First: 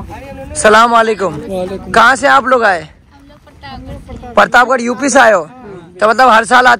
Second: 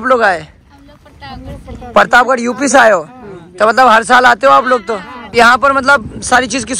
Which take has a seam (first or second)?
second